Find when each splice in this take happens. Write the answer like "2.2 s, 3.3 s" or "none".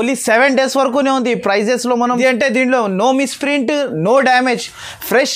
2.1 s